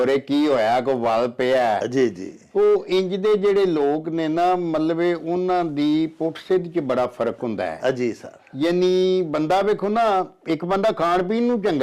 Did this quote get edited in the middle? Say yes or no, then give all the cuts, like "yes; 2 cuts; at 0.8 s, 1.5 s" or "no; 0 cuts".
no; 0 cuts